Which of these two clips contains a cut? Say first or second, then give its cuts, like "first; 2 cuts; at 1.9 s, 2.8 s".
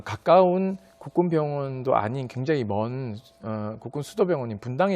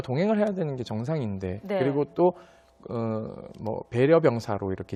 first; 1 cut; at 1.2 s